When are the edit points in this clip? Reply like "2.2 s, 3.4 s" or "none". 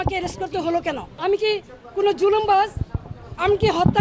1.1 s